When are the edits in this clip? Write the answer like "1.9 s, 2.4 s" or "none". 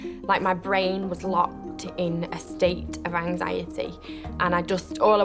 none